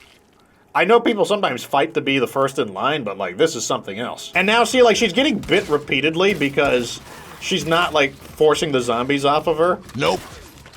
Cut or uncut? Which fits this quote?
cut